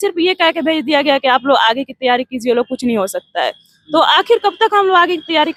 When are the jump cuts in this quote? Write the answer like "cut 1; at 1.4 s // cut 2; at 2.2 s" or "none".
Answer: none